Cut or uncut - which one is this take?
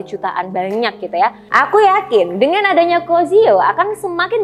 cut